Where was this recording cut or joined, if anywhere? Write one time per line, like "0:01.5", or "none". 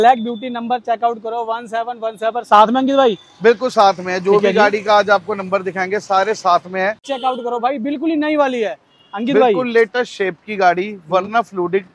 0:07.1

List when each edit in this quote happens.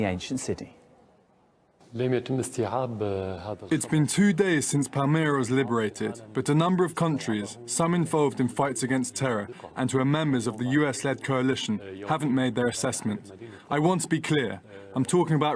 0:05.9

